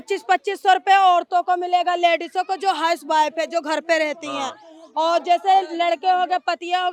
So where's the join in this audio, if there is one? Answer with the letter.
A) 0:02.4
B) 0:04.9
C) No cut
C